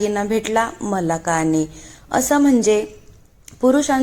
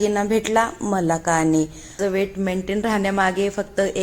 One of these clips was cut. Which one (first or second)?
second